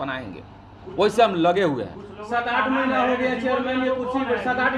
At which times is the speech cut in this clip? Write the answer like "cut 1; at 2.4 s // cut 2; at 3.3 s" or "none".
none